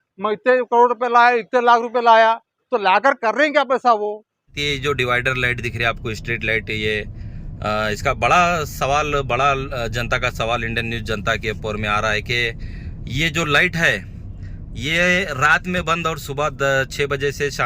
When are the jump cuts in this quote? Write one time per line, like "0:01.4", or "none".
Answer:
0:04.6